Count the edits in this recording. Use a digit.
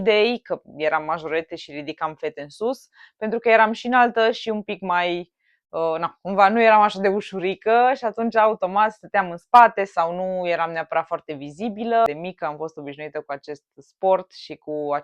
1